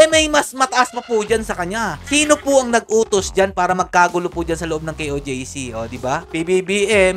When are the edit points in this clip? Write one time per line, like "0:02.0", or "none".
0:02.0
0:06.2